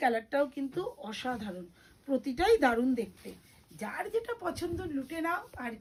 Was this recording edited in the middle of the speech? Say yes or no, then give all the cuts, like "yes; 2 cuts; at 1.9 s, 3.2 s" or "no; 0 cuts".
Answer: no; 0 cuts